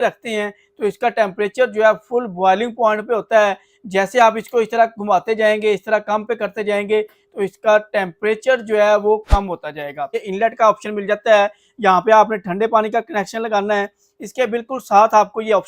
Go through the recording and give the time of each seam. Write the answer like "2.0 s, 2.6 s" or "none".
10.2 s